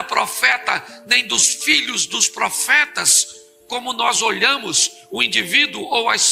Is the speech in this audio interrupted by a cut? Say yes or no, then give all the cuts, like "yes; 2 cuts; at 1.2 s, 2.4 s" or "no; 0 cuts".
no; 0 cuts